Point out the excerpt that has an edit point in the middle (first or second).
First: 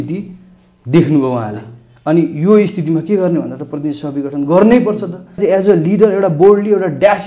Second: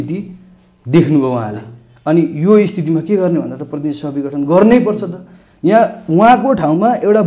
first